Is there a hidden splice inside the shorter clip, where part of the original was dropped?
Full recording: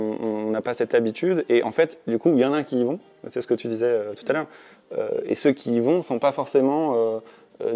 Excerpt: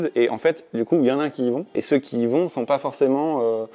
yes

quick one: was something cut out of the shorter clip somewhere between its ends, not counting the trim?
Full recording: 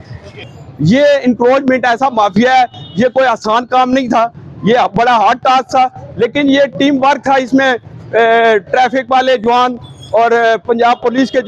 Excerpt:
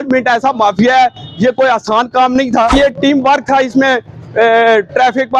yes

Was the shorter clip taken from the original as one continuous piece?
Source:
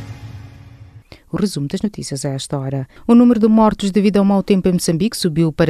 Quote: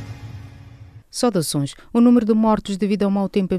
no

